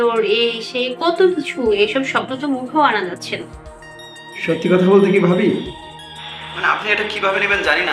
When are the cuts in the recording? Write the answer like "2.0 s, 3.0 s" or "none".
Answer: none